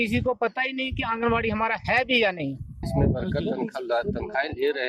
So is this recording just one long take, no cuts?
no; 1 cut; at 2.9 s

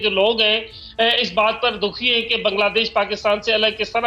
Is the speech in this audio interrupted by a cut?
no; 0 cuts

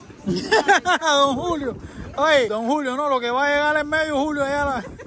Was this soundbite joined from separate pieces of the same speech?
yes; 1 cut; at 2.5 s

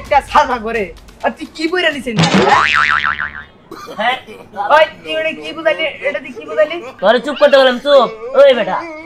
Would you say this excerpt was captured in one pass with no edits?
yes; 0 cuts

